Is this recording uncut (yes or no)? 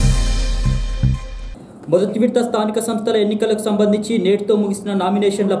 yes